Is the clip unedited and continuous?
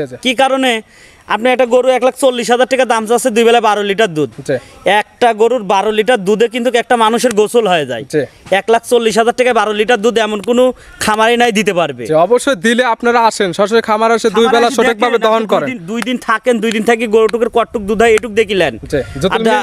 yes; 0 cuts

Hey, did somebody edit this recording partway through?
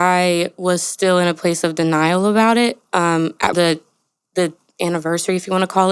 yes; 1 cut; at 3.5 s

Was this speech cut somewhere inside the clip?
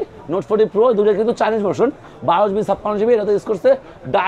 no; 0 cuts

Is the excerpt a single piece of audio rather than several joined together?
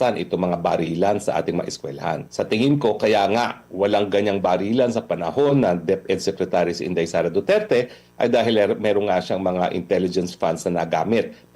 no; 1 cut; at 2.3 s

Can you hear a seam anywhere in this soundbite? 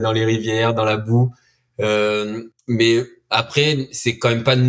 no; 0 cuts

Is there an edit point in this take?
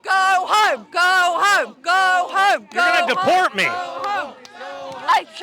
no; 0 cuts

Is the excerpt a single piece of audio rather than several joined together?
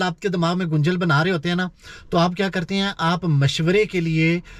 yes; 0 cuts

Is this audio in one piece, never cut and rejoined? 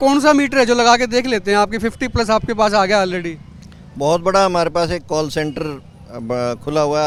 yes; 0 cuts

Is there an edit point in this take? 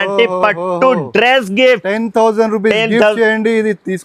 no; 0 cuts

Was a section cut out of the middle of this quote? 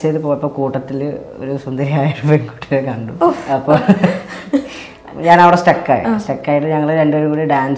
yes; 1 cut; at 3.4 s

